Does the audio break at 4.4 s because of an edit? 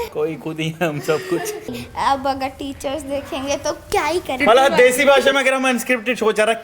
yes; 2 cuts; at 1.8 s, 4.4 s

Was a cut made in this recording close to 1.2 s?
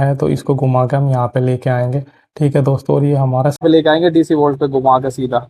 no; 1 cut; at 3.6 s

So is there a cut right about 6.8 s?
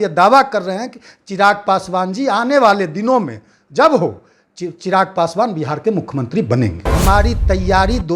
yes; 1 cut; at 6.8 s

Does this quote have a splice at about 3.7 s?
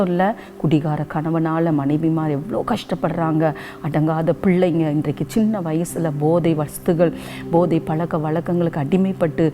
no; 0 cuts

